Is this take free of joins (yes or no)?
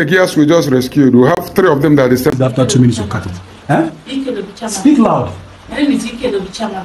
no